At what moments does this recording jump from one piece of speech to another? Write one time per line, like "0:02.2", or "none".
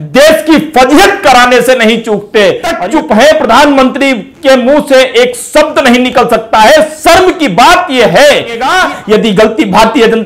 0:02.7
0:08.7